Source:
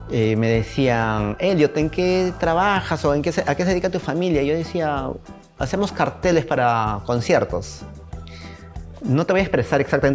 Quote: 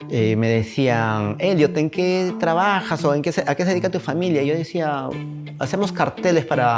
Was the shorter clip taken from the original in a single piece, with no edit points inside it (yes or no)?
yes